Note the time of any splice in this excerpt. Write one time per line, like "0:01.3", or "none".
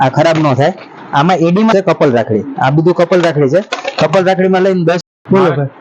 0:01.7
0:05.0